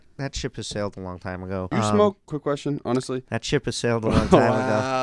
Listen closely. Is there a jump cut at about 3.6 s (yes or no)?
no